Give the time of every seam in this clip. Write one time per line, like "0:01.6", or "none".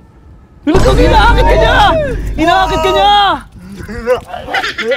none